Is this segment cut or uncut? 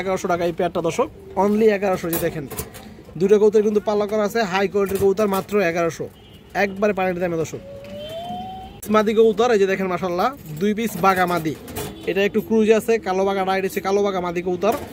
uncut